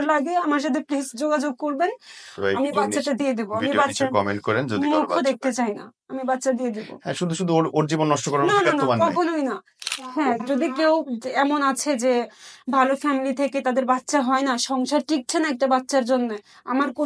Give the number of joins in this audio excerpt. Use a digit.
1